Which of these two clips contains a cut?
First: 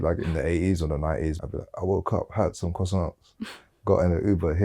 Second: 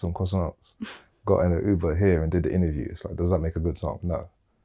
first; 1 cut; at 1.4 s

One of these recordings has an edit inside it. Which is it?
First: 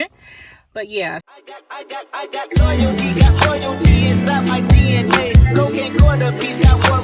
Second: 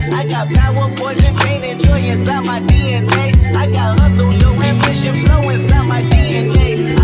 first; 1 cut; at 1.2 s

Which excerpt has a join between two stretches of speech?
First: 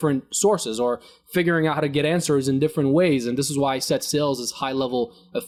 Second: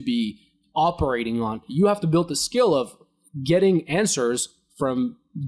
second; 1 cut; at 1.6 s

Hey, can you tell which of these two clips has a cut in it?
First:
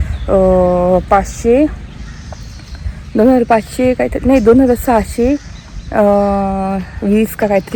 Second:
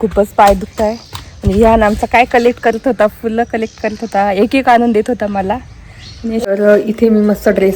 second; 1 cut; at 6.4 s

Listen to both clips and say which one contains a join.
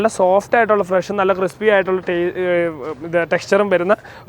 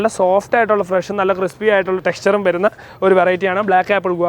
second; 1 cut; at 2.0 s

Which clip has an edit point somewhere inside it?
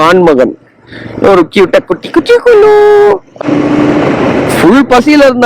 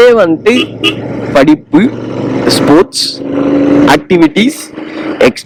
first; 1 cut; at 3.3 s

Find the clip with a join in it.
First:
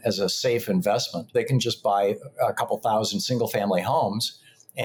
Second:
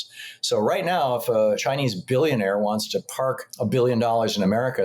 second; 2 cuts; at 1.6 s, 3.5 s

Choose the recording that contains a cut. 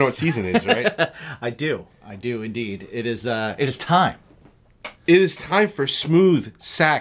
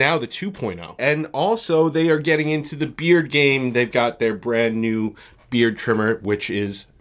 second; 1 cut; at 1.0 s

